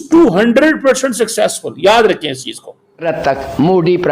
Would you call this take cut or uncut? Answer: cut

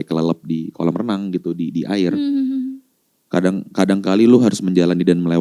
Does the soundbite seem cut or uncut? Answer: uncut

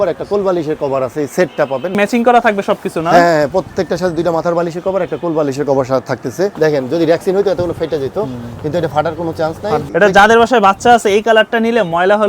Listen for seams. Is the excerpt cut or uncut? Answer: cut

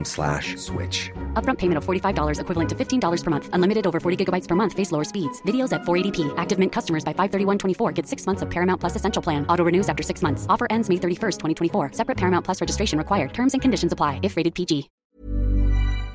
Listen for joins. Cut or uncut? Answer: cut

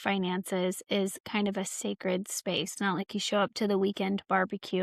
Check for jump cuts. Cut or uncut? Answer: cut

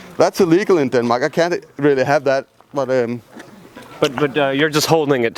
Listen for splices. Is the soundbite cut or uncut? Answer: uncut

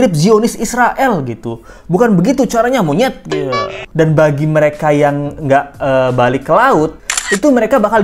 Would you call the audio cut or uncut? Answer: cut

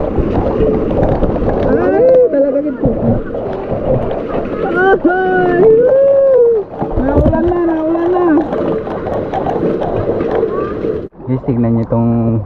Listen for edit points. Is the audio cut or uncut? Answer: cut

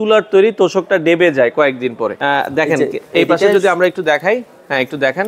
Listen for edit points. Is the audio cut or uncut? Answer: cut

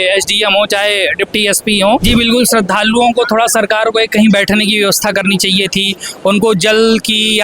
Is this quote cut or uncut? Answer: cut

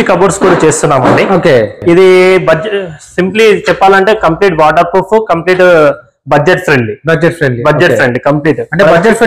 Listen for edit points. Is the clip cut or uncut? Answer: cut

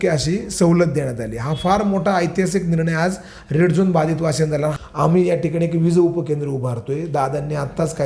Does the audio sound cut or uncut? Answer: cut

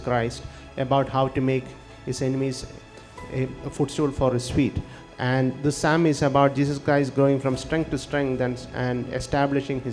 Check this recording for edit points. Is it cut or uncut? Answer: uncut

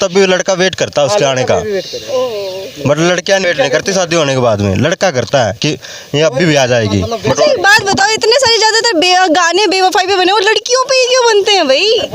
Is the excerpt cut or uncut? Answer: uncut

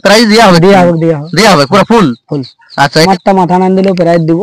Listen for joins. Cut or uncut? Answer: cut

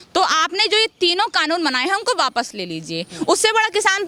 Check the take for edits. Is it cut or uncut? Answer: uncut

